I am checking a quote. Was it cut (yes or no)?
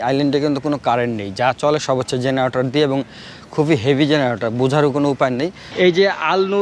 yes